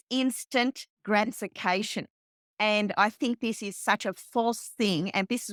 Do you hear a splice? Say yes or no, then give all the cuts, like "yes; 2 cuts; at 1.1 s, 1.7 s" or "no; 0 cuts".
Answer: no; 0 cuts